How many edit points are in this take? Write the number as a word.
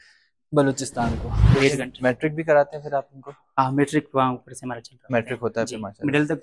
one